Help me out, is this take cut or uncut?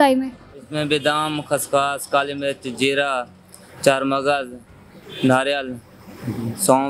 uncut